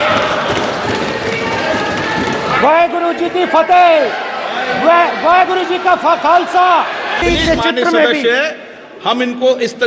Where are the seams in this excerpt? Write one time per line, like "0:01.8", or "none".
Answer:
0:07.2